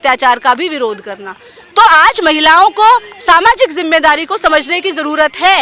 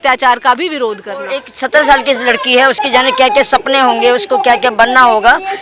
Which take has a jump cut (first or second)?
second